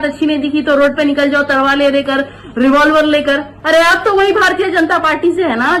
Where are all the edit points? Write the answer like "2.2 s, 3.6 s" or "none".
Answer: 3.5 s

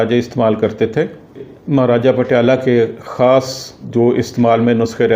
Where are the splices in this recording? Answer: 1.5 s, 3.7 s

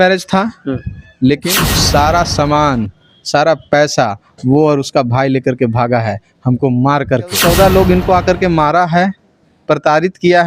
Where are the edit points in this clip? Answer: 1.5 s, 7.4 s

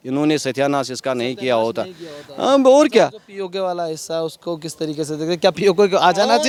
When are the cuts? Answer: none

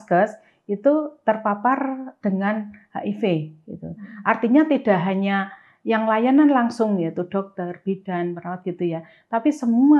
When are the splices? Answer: none

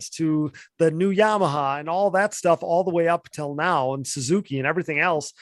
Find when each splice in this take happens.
none

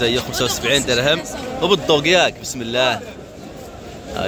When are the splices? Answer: none

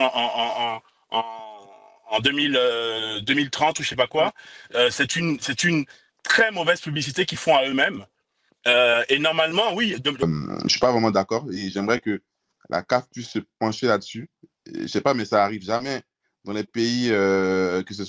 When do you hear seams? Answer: 10.2 s

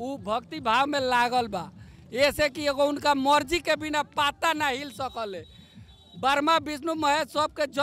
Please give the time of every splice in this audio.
none

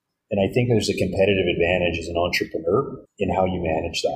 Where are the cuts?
3.0 s

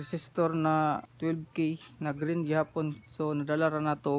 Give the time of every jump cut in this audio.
1.1 s

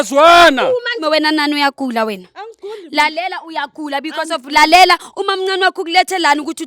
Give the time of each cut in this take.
0.9 s

